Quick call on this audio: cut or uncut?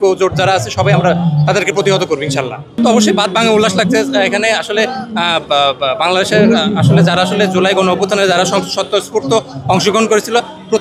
uncut